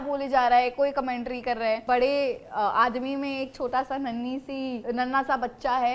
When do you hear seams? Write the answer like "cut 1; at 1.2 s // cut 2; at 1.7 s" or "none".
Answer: cut 1; at 1.8 s // cut 2; at 4.8 s